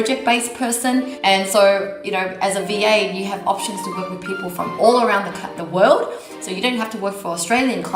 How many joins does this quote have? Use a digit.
1